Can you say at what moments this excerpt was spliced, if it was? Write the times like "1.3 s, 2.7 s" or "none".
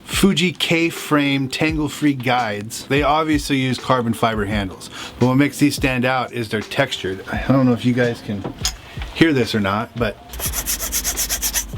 10.3 s

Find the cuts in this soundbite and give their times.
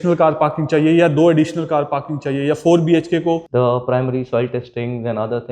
3.5 s

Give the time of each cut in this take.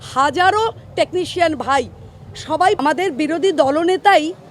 2.8 s

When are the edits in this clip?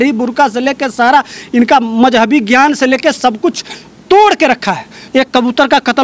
5.0 s

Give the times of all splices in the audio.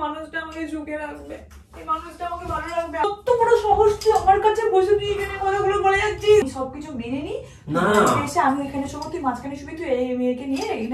3.0 s, 6.5 s

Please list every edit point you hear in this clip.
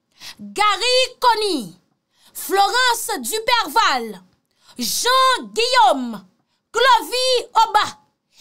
none

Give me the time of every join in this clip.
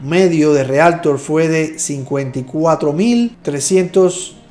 none

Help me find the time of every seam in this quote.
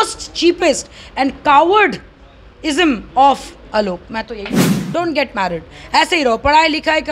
4.8 s

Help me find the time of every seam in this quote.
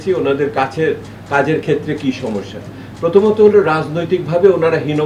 none

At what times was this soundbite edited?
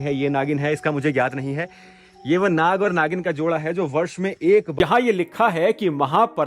4.7 s

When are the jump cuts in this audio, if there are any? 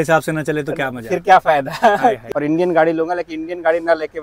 2.3 s

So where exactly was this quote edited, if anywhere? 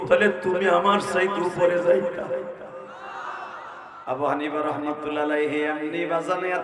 4.0 s

